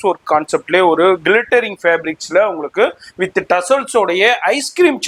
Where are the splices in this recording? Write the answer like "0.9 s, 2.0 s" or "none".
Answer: none